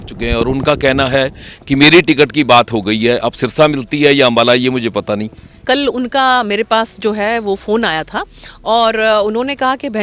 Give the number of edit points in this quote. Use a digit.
1